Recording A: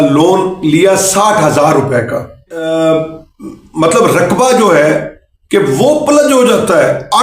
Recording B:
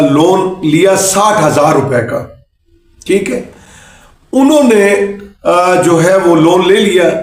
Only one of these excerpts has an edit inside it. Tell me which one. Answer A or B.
A